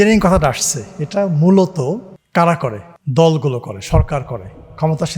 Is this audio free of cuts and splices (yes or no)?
no